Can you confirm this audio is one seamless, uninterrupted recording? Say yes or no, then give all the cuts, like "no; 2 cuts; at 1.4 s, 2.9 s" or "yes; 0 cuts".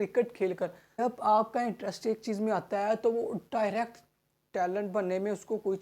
no; 1 cut; at 1.0 s